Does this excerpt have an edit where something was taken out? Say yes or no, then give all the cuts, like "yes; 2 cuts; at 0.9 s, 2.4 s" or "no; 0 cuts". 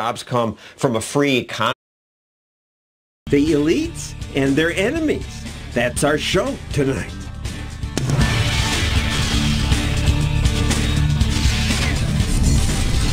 no; 0 cuts